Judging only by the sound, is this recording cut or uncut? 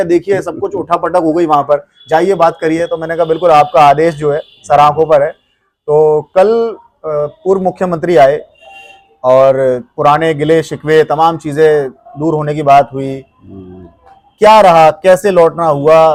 uncut